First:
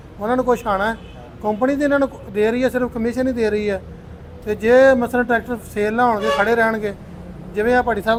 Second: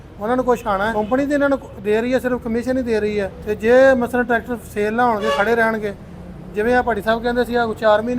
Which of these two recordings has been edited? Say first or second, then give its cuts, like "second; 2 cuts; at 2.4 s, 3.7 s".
second; 2 cuts; at 0.9 s, 3.4 s